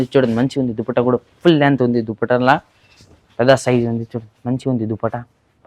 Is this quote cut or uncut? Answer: uncut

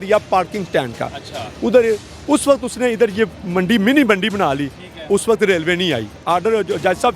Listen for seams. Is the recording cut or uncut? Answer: cut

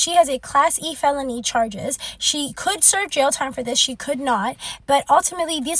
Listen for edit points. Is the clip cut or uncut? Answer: uncut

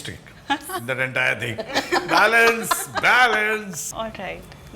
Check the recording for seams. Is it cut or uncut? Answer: cut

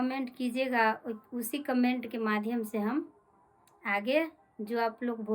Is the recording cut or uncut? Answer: uncut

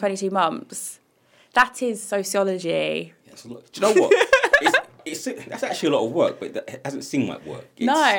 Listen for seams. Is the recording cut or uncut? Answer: uncut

